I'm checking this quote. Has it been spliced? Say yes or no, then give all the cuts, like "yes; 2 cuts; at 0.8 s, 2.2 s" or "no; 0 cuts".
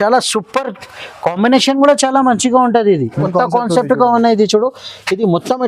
yes; 1 cut; at 3.2 s